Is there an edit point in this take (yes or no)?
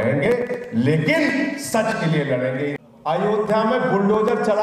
yes